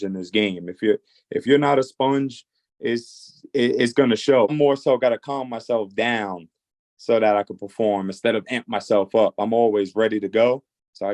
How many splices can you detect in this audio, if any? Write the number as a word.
one